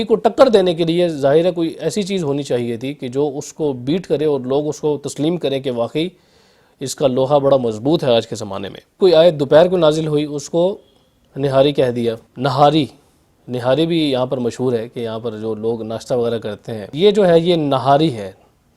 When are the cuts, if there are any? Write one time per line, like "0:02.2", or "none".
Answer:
0:09.0
0:12.3
0:16.9